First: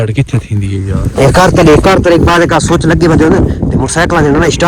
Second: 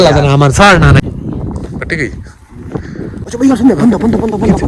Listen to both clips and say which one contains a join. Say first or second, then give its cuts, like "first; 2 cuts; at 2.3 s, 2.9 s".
second; 2 cuts; at 1.0 s, 3.1 s